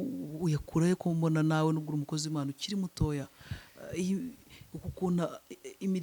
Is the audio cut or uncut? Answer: uncut